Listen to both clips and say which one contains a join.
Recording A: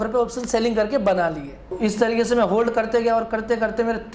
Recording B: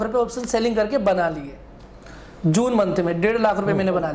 A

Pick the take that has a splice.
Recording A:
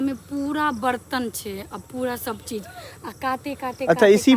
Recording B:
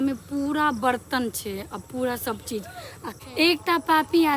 B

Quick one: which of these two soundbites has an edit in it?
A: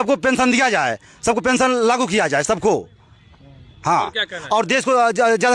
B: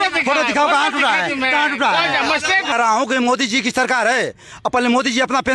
B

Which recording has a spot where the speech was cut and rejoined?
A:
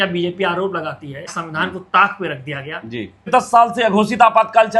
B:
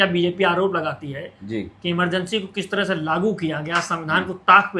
A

